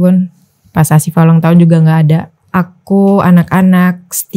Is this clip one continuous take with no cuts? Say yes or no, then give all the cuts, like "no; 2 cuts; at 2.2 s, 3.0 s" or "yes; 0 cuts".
no; 1 cut; at 2.4 s